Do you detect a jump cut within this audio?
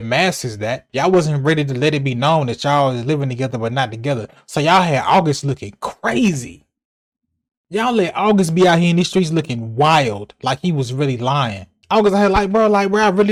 no; 0 cuts

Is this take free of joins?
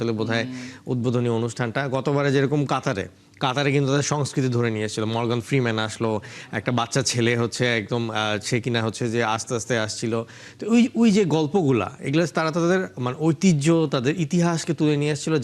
yes; 0 cuts

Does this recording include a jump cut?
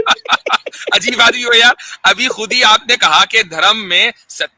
no; 0 cuts

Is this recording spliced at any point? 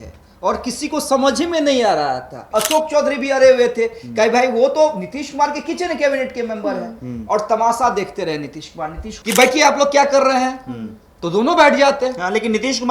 yes; 2 cuts; at 2.3 s, 9.1 s

